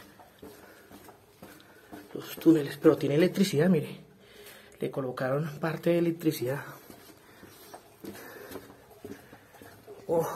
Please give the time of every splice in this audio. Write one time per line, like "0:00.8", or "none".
none